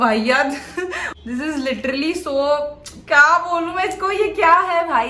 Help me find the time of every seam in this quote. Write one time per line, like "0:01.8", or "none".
0:01.0